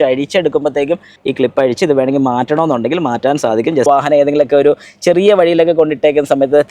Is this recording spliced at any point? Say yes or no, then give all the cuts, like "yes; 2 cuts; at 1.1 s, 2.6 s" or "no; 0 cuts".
yes; 2 cuts; at 1.1 s, 3.9 s